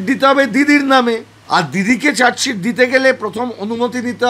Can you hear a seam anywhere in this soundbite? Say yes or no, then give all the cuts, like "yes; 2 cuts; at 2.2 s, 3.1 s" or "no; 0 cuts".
yes; 1 cut; at 1.3 s